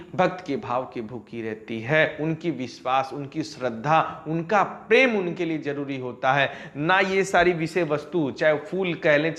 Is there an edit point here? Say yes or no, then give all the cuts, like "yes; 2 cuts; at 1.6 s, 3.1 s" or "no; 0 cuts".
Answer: no; 0 cuts